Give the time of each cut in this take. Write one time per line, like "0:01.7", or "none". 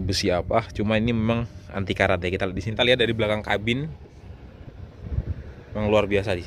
0:02.7

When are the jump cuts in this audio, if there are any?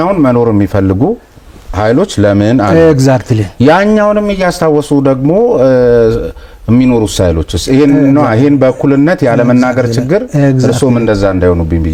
none

